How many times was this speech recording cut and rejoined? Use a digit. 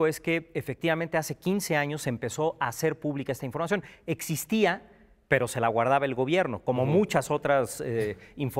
0